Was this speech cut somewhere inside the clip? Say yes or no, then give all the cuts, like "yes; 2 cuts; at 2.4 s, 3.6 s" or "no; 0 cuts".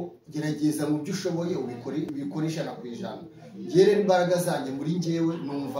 yes; 1 cut; at 2.1 s